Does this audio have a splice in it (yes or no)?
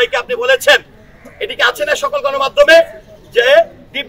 no